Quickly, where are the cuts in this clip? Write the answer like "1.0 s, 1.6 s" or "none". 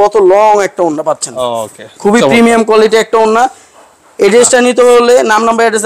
none